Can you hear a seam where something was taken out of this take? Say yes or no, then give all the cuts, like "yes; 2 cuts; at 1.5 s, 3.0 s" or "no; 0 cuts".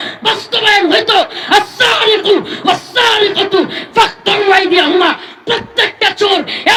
no; 0 cuts